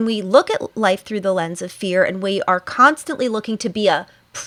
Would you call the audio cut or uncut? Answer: uncut